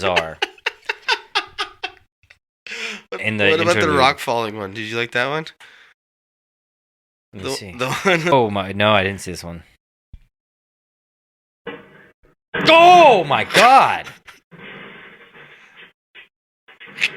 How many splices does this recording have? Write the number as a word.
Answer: two